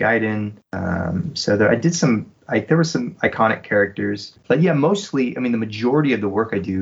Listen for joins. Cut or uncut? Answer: uncut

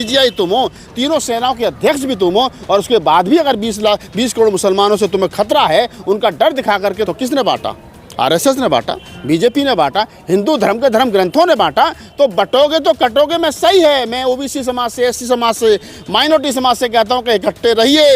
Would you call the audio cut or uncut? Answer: cut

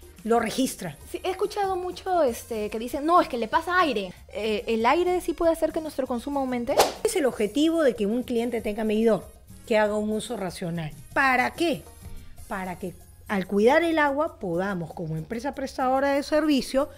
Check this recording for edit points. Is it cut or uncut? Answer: cut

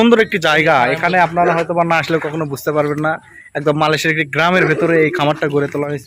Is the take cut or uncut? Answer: uncut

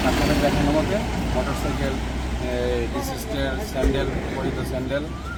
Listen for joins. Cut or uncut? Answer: uncut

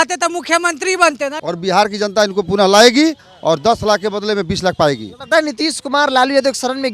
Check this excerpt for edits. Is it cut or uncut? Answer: cut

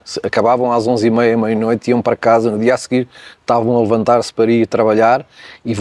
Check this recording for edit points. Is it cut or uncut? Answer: uncut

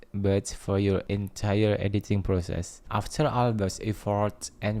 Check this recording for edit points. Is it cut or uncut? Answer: cut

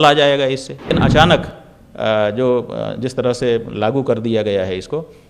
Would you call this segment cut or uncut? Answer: cut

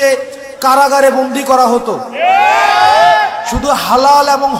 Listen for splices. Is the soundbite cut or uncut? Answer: uncut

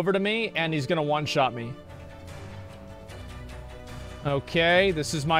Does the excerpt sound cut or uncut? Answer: uncut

